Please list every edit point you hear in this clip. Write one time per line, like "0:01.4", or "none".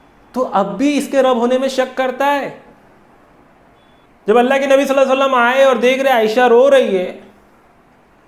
0:04.1